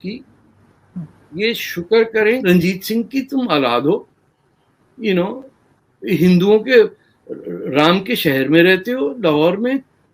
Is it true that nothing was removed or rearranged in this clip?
no; 1 cut; at 2.4 s

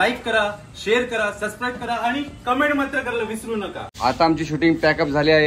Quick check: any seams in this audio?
yes; 1 cut; at 3.8 s

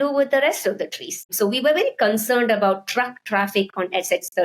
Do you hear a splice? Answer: yes; 1 cut; at 1.3 s

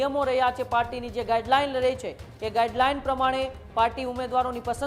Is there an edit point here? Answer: no; 0 cuts

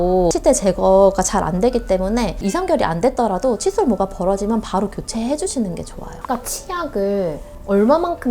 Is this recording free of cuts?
no; 2 cuts; at 2.4 s, 6.2 s

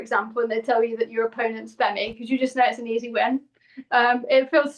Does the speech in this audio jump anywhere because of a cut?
no; 0 cuts

